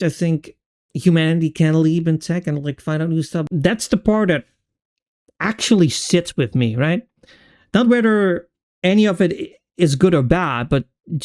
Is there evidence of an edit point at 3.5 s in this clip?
yes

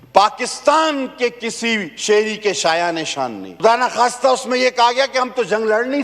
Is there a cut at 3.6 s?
yes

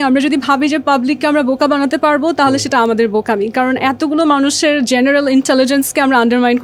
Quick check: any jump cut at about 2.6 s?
no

